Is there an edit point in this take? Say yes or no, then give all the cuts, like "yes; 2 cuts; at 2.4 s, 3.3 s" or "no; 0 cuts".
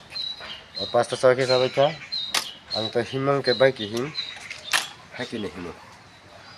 no; 0 cuts